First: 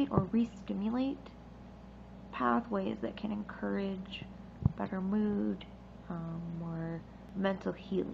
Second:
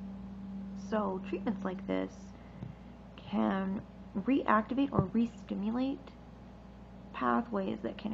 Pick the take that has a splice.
first; 1 cut; at 7.2 s

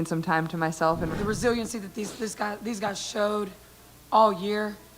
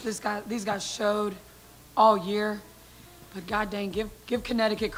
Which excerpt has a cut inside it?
first; 1 cut; at 1.2 s

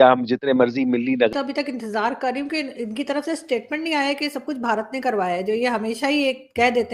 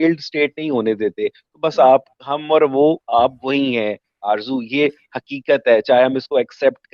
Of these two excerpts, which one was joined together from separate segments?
first; 1 cut; at 1.3 s

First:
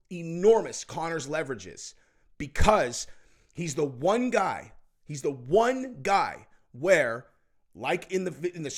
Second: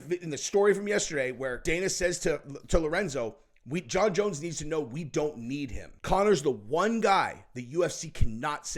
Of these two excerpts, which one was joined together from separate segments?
second; 2 cuts; at 1.6 s, 5.9 s

